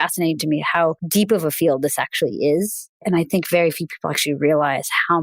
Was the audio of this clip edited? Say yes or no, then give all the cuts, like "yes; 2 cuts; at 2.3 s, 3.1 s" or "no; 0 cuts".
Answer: yes; 2 cuts; at 1.0 s, 2.9 s